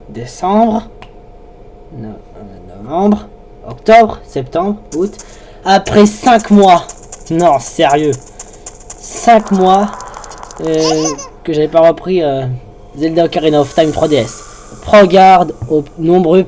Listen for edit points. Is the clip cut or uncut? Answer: cut